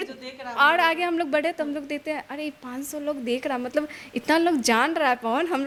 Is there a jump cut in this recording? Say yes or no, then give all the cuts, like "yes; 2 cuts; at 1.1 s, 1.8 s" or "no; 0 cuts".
no; 0 cuts